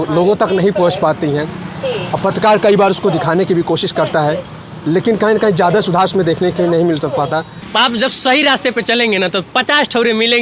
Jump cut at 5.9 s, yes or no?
no